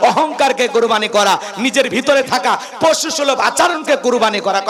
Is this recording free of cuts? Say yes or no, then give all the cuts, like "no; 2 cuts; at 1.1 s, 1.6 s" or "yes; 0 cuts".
yes; 0 cuts